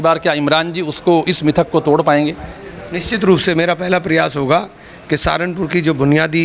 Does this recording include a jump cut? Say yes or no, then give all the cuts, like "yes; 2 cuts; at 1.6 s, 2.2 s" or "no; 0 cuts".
no; 0 cuts